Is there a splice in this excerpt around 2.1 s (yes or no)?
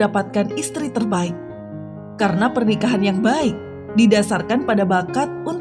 no